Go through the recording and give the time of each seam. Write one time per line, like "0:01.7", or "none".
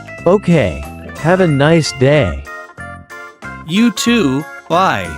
0:01.0